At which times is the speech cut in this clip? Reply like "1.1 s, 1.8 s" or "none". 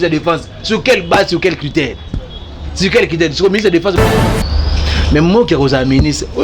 4.0 s